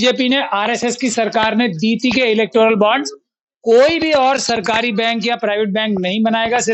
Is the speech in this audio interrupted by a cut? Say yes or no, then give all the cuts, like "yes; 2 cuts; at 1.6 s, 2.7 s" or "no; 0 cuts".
no; 0 cuts